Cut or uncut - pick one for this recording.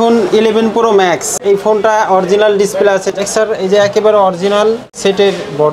cut